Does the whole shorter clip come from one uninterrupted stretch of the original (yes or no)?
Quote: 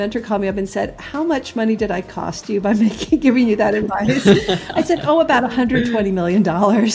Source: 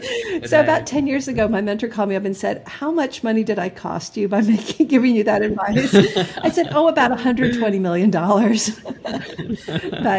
yes